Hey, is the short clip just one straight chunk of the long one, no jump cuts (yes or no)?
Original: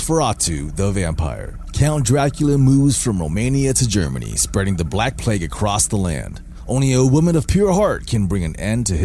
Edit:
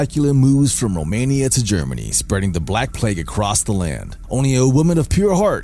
no